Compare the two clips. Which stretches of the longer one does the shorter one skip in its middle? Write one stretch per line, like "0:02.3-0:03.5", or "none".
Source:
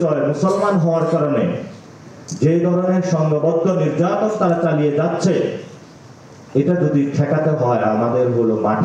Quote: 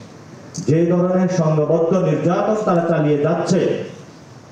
none